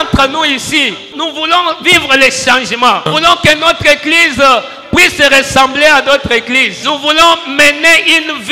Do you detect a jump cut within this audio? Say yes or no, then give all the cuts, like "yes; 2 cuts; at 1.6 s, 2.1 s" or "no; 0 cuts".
yes; 3 cuts; at 1.1 s, 3.1 s, 6.7 s